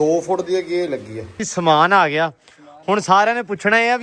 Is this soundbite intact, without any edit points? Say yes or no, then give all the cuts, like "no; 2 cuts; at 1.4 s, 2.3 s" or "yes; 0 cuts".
no; 1 cut; at 1.5 s